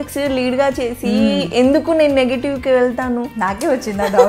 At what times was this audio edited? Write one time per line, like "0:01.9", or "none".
none